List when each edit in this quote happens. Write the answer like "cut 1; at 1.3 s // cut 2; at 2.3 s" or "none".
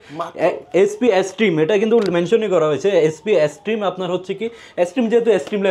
none